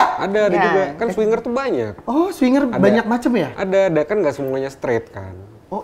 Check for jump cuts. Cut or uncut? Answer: uncut